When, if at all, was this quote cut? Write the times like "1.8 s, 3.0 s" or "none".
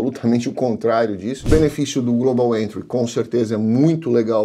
1.4 s